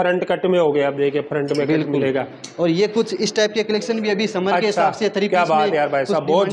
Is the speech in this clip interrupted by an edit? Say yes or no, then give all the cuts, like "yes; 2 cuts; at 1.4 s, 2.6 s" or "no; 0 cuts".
no; 0 cuts